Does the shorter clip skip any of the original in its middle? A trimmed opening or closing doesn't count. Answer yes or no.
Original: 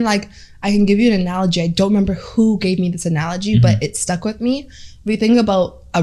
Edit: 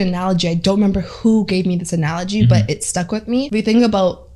yes